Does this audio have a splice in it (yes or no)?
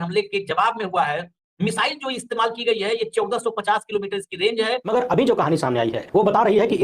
yes